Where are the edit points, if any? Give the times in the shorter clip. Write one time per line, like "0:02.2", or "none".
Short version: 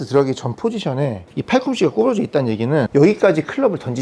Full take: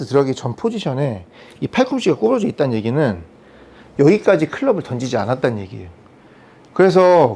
0:01.3
0:02.9